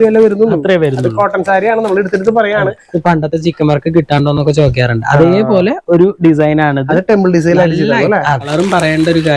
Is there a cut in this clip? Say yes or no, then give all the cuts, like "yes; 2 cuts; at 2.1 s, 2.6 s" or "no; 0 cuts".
yes; 2 cuts; at 2.8 s, 8.5 s